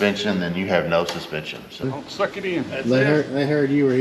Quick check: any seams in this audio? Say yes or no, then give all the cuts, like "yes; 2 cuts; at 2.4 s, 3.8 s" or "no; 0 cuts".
yes; 1 cut; at 1.8 s